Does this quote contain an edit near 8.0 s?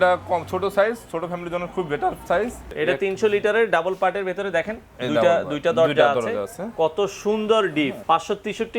yes; 2 cuts; at 2.7 s, 8.0 s

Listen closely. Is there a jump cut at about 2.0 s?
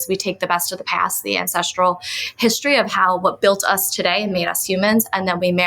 no; 0 cuts

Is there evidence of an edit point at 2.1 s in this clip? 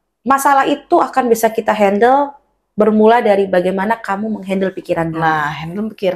no; 0 cuts

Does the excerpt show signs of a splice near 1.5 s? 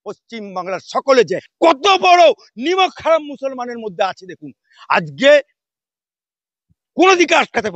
yes; 1 cut; at 1.5 s

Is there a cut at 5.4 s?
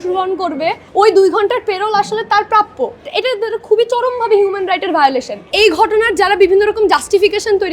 yes; 3 cuts; at 0.8 s, 3.1 s, 5.4 s

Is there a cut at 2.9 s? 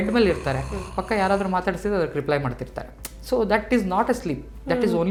no; 0 cuts

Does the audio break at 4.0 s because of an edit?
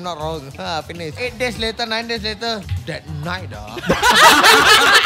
no; 2 cuts; at 1.2 s, 2.7 s

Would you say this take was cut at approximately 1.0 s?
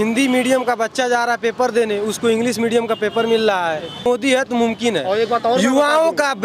no; 1 cut; at 4.0 s

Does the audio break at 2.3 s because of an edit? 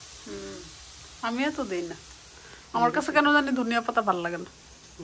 no; 0 cuts

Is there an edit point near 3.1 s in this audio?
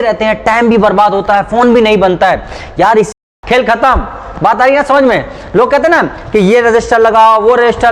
yes; 1 cut; at 3.1 s

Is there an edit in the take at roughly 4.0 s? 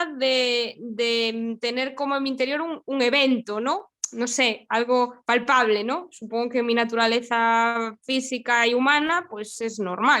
yes; 1 cut; at 4.0 s

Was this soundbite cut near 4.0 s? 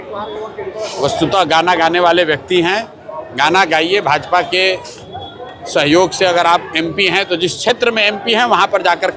no; 0 cuts

